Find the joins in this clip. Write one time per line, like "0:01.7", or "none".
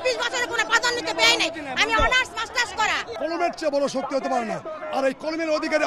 0:03.1